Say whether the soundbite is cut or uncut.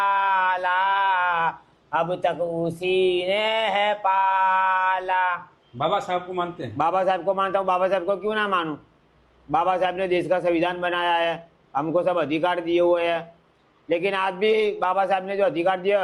cut